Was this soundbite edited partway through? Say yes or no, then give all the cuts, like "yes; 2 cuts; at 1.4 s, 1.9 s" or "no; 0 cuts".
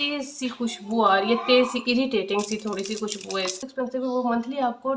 yes; 1 cut; at 3.6 s